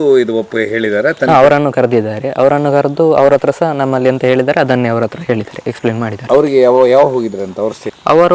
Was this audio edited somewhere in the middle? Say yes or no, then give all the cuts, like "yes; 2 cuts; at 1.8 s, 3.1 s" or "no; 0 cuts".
no; 0 cuts